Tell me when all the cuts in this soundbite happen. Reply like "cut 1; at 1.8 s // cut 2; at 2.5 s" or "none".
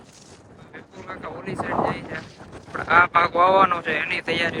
none